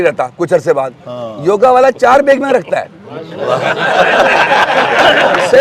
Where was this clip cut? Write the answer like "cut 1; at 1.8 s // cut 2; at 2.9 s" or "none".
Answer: none